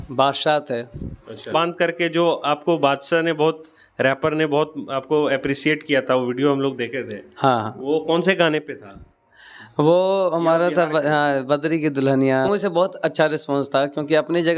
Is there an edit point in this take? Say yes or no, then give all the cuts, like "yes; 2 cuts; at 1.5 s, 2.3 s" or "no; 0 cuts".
yes; 2 cuts; at 1.5 s, 12.5 s